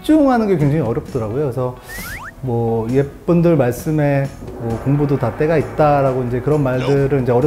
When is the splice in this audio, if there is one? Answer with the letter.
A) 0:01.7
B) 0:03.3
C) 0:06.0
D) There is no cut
D